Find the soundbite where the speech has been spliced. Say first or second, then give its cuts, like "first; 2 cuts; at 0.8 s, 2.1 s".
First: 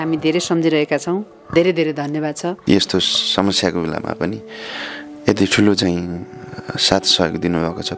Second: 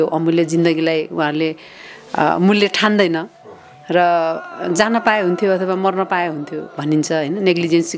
first; 1 cut; at 2.6 s